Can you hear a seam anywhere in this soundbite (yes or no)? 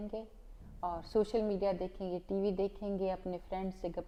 no